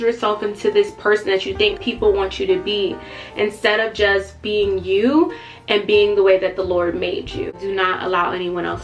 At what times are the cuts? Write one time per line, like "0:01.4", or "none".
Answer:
0:07.6